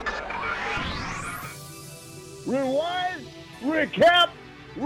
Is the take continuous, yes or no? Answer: yes